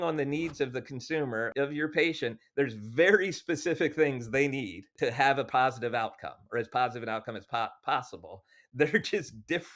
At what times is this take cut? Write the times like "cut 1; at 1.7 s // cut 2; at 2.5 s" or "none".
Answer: cut 1; at 1.5 s // cut 2; at 4.9 s